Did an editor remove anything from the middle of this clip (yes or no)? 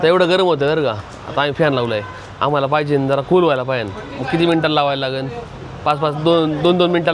no